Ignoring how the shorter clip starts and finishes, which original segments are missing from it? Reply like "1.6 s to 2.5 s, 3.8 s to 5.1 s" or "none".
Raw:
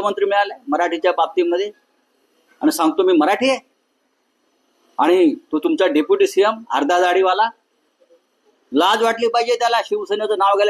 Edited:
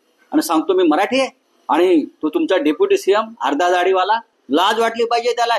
3.8 s to 4.8 s, 7.6 s to 8.6 s

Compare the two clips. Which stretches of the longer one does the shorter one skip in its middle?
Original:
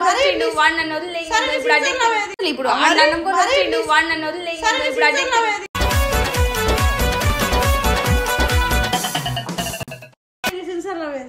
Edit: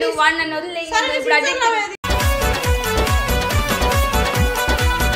2.3 s to 5.6 s

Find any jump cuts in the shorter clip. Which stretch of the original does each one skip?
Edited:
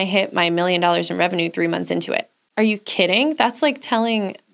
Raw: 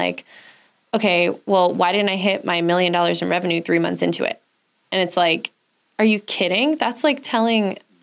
4.5 s to 5.8 s

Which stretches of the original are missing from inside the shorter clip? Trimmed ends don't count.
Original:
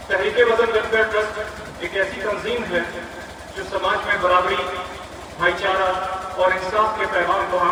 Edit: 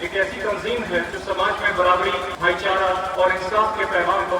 2.9 s to 3.6 s, 4.8 s to 5.3 s, 6.1 s to 6.3 s

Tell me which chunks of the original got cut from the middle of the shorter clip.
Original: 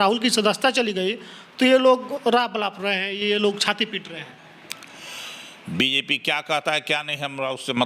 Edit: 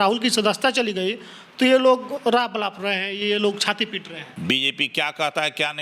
4.2 s to 5.5 s

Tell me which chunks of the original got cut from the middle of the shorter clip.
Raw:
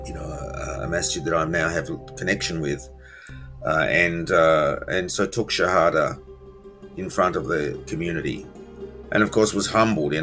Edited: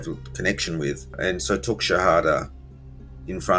3.0 s to 4.8 s

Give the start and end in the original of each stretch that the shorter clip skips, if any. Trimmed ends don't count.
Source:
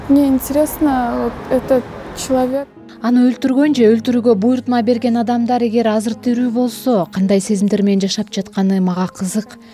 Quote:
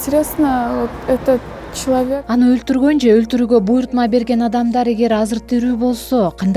2.7 s to 3.0 s

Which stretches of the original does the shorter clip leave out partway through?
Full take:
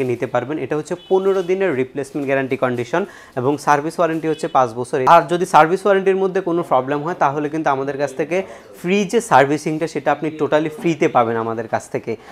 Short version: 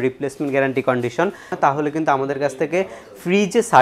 3.2 s to 7.1 s

